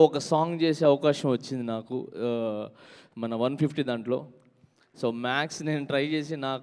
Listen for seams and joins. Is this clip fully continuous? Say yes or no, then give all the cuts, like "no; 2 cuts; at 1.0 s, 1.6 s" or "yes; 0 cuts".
yes; 0 cuts